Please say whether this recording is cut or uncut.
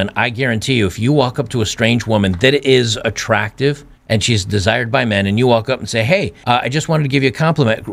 uncut